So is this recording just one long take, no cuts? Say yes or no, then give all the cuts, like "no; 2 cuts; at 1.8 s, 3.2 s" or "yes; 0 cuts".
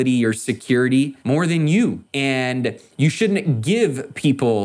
no; 2 cuts; at 1.2 s, 2.1 s